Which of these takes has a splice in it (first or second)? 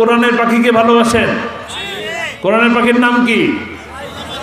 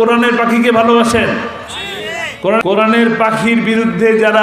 second